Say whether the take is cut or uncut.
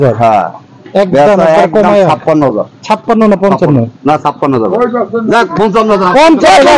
uncut